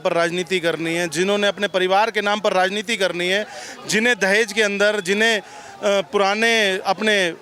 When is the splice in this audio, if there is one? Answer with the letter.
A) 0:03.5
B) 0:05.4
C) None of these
C